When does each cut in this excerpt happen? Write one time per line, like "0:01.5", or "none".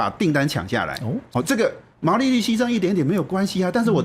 0:01.2